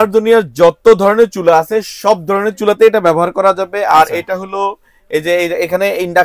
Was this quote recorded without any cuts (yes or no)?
yes